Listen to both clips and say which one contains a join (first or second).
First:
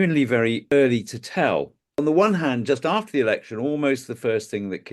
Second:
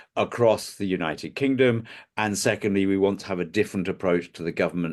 first